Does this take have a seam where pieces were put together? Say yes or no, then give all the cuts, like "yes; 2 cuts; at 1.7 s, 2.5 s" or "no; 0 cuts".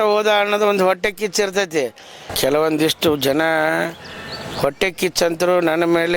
yes; 1 cut; at 2.2 s